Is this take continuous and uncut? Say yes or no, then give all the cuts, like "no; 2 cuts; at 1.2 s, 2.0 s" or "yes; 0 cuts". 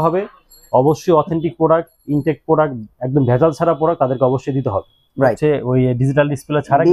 no; 1 cut; at 5.4 s